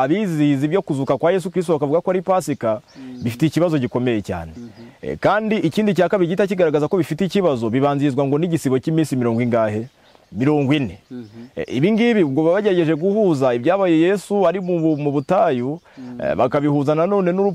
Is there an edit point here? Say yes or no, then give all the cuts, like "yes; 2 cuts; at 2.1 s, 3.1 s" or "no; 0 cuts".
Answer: no; 0 cuts